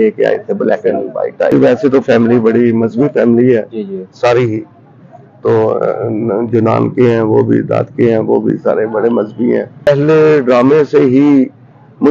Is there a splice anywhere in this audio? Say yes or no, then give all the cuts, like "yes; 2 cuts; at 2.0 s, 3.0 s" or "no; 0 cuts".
yes; 2 cuts; at 1.5 s, 9.9 s